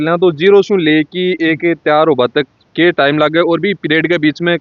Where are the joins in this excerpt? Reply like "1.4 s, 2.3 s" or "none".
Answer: none